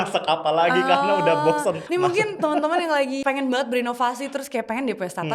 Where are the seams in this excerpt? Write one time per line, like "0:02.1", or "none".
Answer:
0:01.8
0:03.2